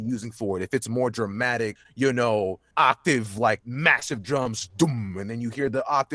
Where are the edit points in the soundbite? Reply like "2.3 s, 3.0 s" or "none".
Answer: 1.8 s, 2.6 s, 3.7 s